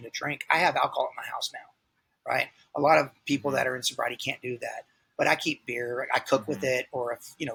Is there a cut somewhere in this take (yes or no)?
no